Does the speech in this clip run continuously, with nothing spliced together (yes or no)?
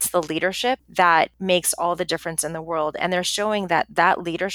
no